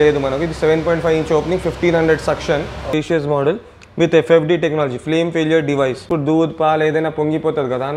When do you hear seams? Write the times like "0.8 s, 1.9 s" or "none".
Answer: 2.9 s, 6.1 s